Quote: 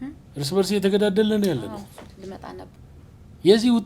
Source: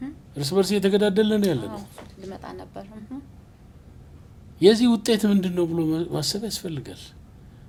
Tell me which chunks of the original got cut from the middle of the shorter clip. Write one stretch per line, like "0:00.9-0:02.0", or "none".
0:02.7-0:03.9

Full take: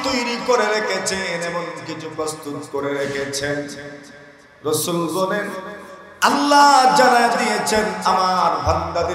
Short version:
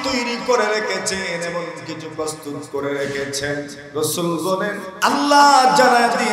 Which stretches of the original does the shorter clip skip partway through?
0:03.8-0:04.5
0:05.6-0:06.1

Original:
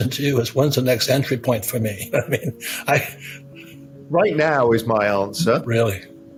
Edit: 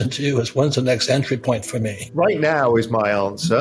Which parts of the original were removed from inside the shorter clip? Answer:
0:02.0-0:03.9

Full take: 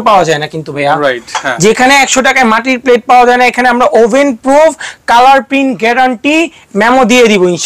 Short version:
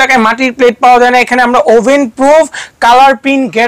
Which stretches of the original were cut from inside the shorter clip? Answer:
none

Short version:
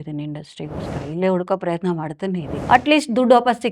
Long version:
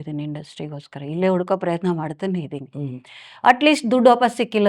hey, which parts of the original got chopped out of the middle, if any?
0:02.5-0:03.3

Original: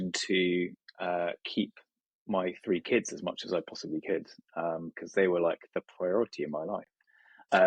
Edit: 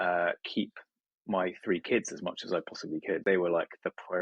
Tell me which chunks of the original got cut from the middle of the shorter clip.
0:04.2-0:05.1

